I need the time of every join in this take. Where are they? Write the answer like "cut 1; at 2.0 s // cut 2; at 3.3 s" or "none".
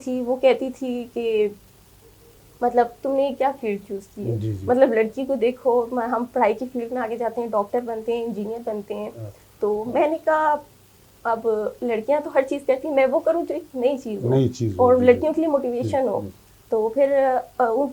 none